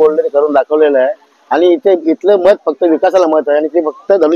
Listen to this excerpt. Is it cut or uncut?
uncut